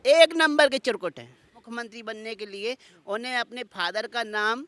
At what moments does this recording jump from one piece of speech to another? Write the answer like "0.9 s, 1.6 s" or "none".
1.6 s